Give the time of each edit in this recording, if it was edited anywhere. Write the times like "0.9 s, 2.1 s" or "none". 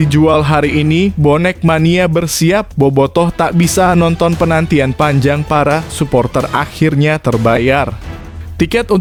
none